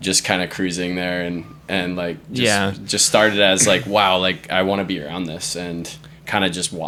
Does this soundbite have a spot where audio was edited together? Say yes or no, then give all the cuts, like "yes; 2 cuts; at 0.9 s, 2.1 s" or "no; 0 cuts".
no; 0 cuts